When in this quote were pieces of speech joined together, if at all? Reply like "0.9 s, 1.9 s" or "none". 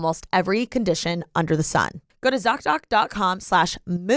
2.0 s

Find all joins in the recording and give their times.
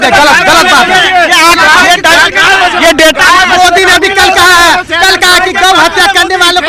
none

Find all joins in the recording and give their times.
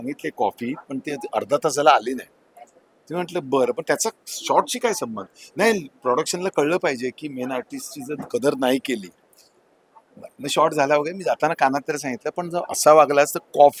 none

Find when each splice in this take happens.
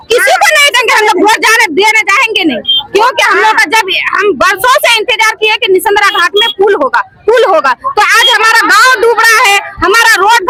none

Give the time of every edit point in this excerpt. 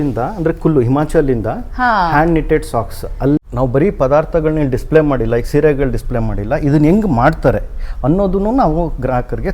3.4 s

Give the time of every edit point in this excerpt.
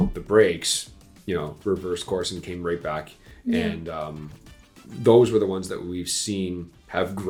none

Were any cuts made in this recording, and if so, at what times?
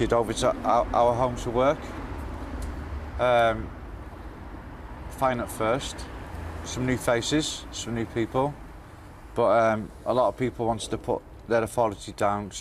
5.8 s

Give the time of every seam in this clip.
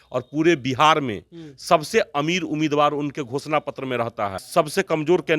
4.4 s

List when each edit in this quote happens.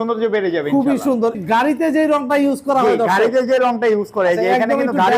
1.4 s

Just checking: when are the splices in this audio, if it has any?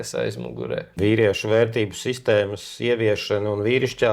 0.9 s

